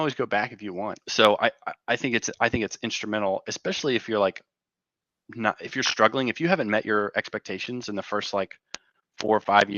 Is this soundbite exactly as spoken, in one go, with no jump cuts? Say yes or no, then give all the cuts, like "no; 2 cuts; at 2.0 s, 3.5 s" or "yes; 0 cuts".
no; 1 cut; at 1.0 s